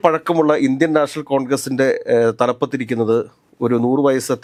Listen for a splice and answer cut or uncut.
uncut